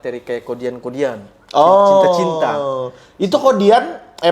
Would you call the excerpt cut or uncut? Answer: uncut